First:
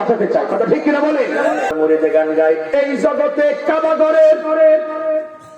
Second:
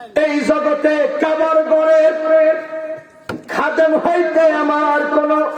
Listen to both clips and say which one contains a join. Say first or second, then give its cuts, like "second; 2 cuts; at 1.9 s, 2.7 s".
first; 1 cut; at 1.7 s